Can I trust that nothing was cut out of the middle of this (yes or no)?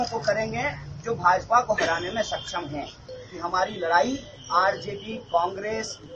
no